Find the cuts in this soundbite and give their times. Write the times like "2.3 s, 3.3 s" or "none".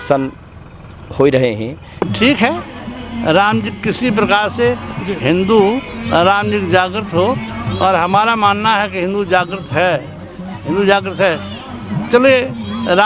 2.1 s